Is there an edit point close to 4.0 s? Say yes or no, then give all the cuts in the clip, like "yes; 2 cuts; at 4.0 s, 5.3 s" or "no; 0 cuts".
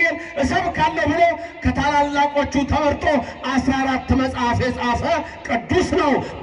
no; 0 cuts